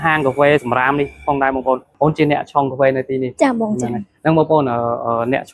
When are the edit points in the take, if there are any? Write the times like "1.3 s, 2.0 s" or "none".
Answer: 1.9 s